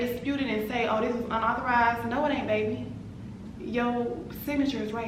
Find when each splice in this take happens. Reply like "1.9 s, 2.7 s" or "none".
none